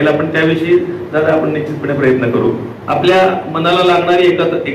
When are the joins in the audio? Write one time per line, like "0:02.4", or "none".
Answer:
0:02.7